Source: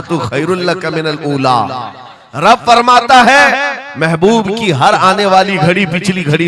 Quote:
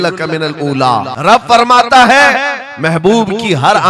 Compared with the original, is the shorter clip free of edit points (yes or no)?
no